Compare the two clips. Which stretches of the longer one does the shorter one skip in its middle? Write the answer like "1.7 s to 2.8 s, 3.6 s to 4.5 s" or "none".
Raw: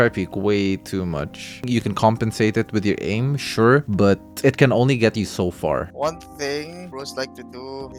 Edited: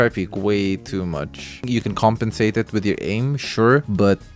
none